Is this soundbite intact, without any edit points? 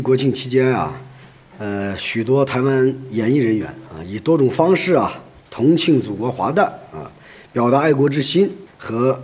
yes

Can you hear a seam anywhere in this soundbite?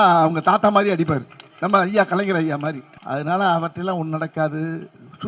yes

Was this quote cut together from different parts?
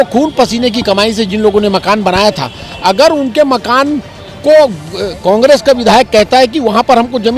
no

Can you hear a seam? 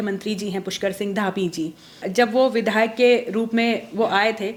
no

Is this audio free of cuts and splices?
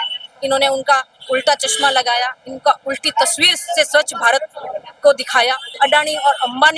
no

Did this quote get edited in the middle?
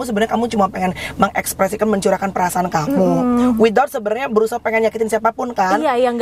no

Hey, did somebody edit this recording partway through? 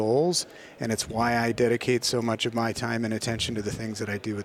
no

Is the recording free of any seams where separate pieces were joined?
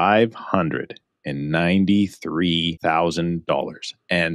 no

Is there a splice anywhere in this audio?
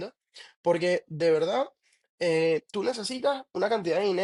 no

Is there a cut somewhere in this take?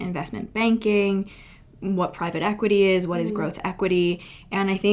no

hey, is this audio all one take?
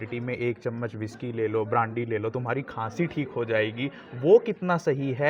yes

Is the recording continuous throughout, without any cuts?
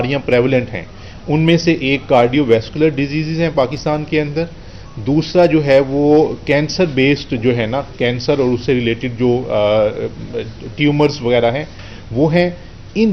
yes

